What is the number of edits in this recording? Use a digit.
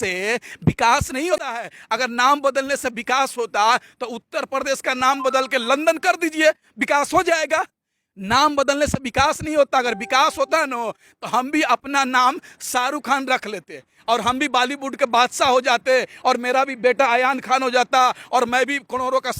1